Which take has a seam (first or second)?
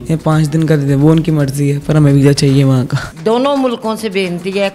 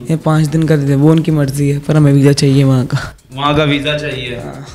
first